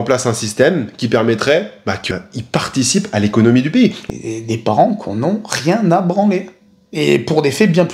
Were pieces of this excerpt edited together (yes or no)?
yes